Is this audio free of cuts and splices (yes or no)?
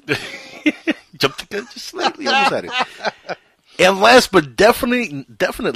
no